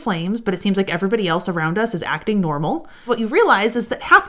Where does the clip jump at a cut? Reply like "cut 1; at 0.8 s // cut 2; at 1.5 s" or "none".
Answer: cut 1; at 3.0 s